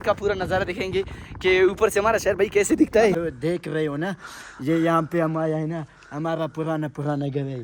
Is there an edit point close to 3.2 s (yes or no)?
yes